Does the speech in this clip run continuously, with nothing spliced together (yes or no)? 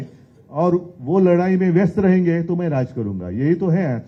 yes